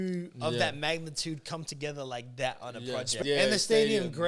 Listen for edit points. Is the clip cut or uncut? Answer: cut